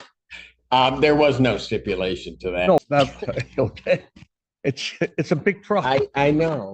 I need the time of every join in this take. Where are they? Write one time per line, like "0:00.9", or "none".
0:02.8